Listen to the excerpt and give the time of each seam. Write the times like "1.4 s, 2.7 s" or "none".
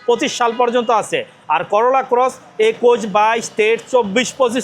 none

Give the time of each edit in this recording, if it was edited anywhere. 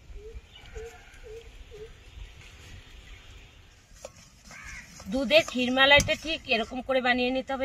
3.9 s

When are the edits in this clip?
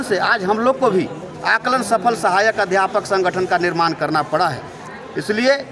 none

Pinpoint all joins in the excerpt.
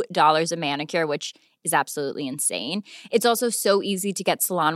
none

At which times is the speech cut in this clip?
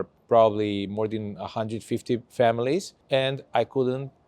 3.0 s

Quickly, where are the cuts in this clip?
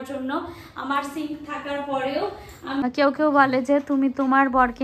2.8 s

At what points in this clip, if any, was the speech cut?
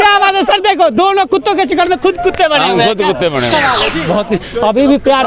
3.9 s

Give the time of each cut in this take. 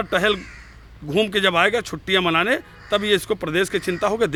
none

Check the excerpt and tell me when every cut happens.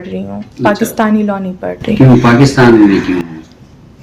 none

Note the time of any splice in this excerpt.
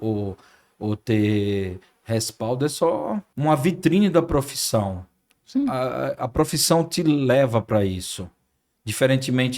3.3 s

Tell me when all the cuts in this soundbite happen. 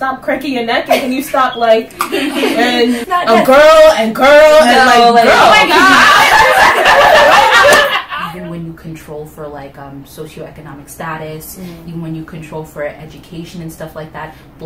3.0 s, 8.0 s

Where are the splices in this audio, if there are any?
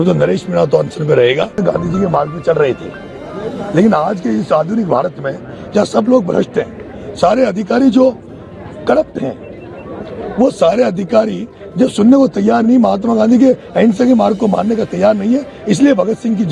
1.6 s

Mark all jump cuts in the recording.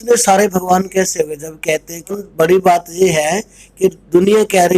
2.2 s

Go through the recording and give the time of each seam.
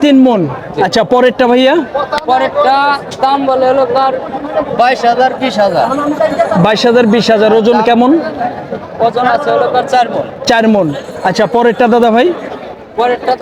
none

